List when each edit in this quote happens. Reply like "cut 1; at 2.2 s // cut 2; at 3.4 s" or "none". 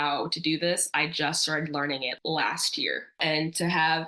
cut 1; at 2.1 s // cut 2; at 3.2 s